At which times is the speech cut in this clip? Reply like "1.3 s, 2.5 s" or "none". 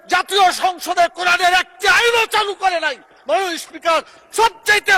none

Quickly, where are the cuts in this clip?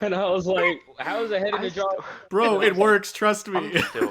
2.1 s

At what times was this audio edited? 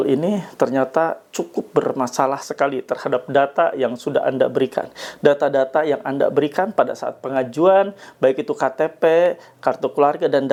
none

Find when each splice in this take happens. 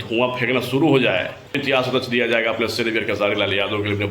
1.5 s

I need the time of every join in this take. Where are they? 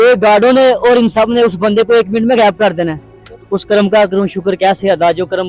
3.3 s

